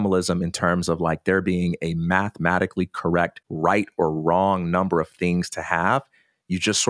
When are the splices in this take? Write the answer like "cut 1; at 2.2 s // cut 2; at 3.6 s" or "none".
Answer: cut 1; at 3.4 s